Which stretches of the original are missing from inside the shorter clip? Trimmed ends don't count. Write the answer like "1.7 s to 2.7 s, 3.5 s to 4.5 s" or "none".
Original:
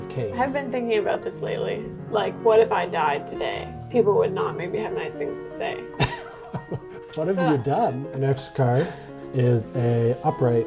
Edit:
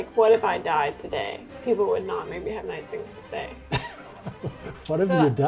none